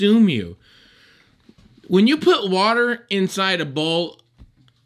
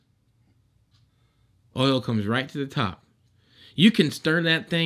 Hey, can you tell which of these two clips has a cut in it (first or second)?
second